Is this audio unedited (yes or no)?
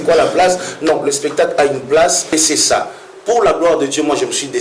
no